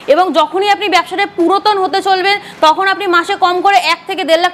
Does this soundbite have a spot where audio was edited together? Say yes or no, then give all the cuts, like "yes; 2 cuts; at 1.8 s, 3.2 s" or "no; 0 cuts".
no; 0 cuts